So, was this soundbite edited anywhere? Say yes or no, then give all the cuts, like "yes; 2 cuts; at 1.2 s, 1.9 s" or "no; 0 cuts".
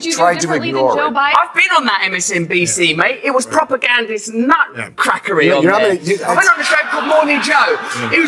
yes; 1 cut; at 1.4 s